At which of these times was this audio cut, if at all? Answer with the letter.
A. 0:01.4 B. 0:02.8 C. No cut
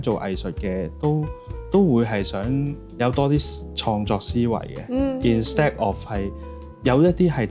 B